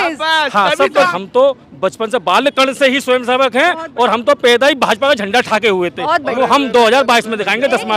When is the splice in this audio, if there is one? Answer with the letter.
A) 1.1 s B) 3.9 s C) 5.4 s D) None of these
A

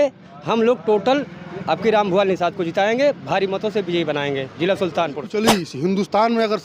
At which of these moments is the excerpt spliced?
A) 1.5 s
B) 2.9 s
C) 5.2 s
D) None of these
C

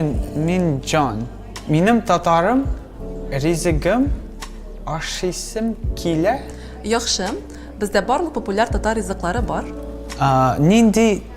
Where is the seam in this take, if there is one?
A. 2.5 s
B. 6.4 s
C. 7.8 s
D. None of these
B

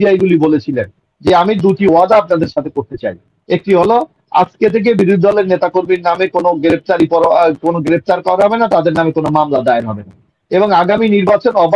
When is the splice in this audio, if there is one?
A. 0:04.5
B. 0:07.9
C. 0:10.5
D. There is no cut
D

